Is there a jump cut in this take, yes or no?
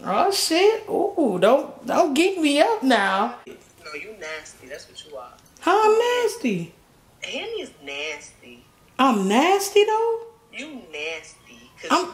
yes